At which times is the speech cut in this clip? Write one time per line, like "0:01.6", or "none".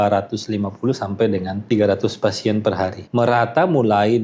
0:01.6
0:03.0